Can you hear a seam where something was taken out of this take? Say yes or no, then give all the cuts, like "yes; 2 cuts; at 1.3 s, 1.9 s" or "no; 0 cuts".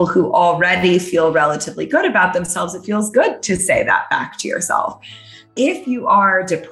yes; 1 cut; at 5.5 s